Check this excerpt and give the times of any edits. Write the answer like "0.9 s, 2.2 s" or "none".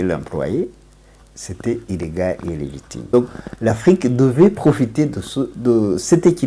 3.1 s